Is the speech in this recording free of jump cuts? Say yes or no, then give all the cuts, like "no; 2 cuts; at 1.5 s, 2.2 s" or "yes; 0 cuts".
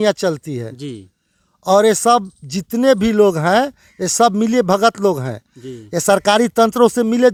yes; 0 cuts